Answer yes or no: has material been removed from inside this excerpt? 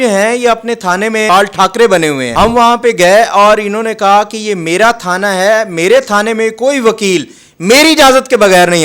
yes